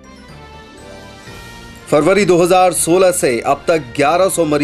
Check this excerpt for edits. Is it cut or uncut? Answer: cut